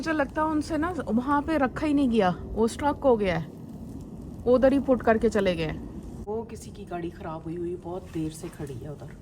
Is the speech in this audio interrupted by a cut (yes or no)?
yes